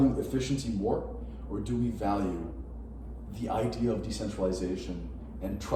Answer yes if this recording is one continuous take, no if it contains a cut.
yes